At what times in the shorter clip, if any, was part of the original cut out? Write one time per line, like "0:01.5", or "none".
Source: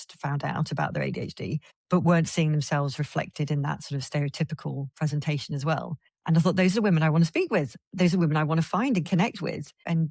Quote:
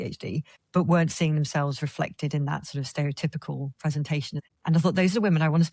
0:04.4